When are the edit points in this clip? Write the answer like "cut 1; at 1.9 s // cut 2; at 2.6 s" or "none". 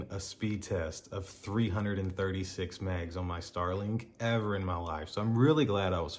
none